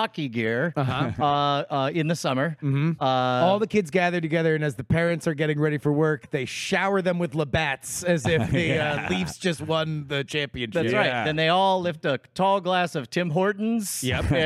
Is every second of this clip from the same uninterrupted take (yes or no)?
yes